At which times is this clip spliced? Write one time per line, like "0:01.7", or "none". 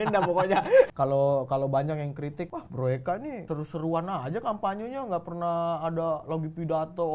0:00.9
0:02.6
0:03.4